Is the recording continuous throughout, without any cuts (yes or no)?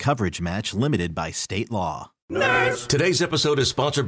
no